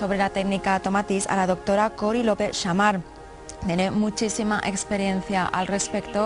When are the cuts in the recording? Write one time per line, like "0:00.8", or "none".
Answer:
0:03.9